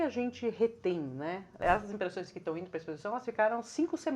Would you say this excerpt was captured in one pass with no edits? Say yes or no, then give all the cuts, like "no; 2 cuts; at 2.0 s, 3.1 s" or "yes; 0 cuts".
no; 1 cut; at 1.6 s